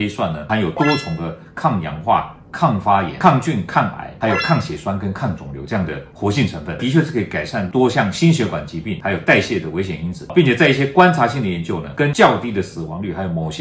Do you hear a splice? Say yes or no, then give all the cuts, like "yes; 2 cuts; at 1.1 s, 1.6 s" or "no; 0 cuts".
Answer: no; 0 cuts